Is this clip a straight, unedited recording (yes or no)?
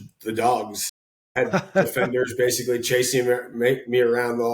yes